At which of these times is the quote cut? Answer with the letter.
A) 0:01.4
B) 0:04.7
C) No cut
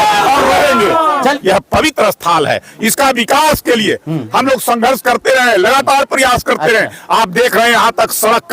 A